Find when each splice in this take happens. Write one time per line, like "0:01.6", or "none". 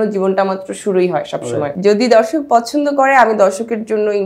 0:01.7